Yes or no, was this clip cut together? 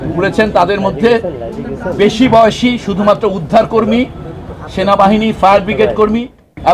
no